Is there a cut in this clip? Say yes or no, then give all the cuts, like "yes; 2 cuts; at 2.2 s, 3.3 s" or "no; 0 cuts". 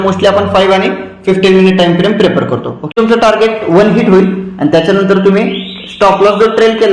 yes; 1 cut; at 2.9 s